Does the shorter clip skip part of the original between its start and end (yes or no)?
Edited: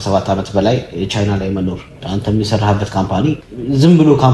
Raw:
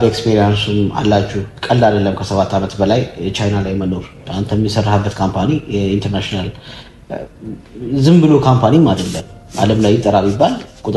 yes